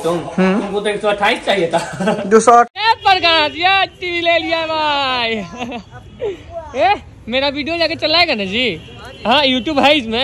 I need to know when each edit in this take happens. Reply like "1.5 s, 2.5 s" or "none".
2.7 s